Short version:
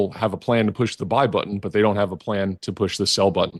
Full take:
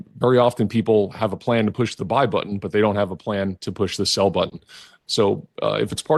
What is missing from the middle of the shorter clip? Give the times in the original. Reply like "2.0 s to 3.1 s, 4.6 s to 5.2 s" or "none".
none